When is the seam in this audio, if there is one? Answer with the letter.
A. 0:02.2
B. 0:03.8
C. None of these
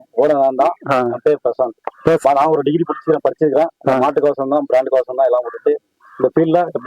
A